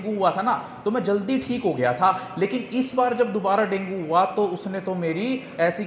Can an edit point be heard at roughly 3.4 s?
no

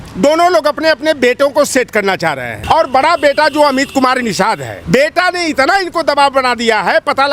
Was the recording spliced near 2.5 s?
yes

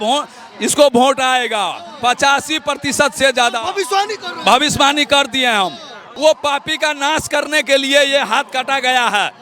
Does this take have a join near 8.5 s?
no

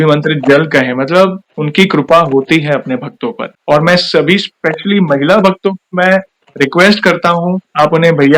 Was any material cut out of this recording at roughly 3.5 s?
yes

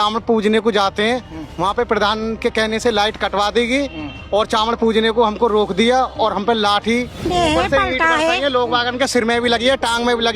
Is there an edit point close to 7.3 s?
yes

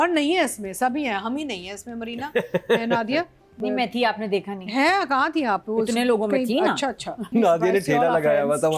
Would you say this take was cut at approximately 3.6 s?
yes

